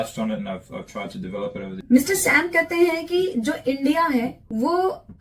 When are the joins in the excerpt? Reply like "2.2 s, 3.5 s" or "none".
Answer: 1.8 s